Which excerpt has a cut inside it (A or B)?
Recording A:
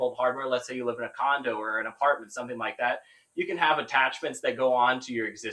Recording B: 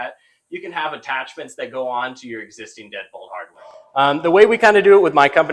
B